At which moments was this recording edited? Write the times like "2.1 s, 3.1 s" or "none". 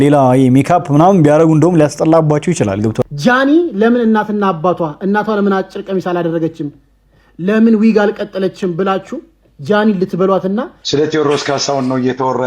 3.0 s, 10.8 s